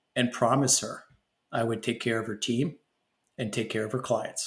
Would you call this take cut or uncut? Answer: uncut